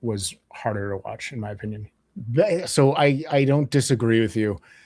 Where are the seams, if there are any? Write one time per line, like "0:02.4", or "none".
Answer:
0:02.0